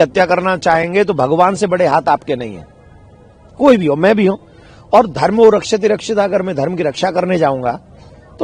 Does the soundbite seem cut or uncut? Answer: uncut